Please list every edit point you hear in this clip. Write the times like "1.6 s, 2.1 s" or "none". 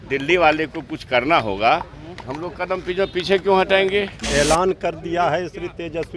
4.3 s